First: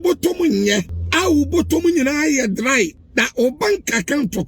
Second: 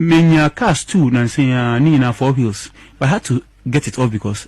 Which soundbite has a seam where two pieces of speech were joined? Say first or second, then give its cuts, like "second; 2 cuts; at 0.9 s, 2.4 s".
first; 2 cuts; at 1.0 s, 3.0 s